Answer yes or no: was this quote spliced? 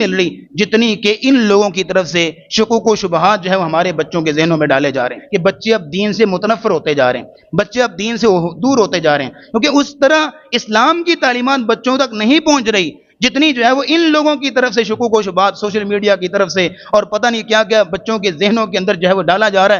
yes